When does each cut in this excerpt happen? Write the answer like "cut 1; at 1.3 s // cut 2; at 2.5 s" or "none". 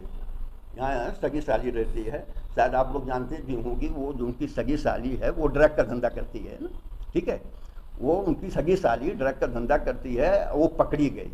none

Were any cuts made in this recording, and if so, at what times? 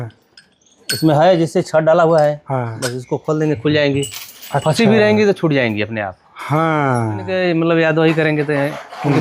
cut 1; at 7.3 s

